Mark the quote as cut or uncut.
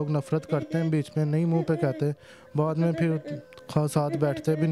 uncut